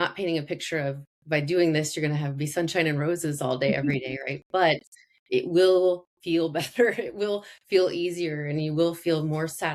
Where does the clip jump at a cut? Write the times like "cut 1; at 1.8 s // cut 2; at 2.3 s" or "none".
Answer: none